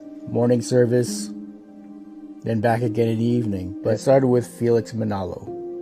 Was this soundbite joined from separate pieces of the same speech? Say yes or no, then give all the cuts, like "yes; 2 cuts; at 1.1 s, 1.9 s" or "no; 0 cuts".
yes; 1 cut; at 4.0 s